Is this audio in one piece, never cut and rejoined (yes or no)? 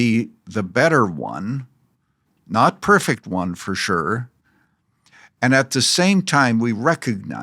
yes